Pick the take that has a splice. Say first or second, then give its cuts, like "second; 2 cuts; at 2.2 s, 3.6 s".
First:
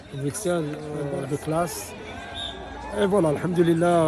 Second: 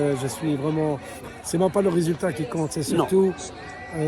first; 1 cut; at 1.0 s